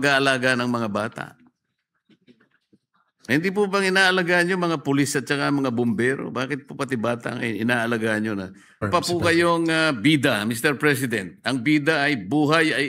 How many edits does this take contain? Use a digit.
2